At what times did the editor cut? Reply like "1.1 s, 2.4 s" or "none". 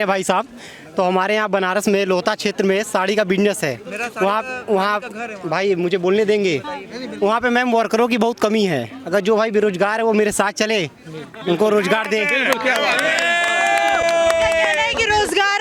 none